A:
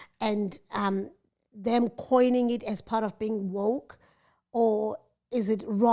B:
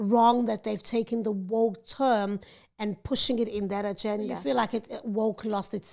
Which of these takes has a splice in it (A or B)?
B